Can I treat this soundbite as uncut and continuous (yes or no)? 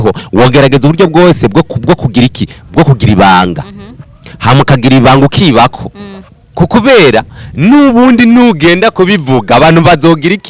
yes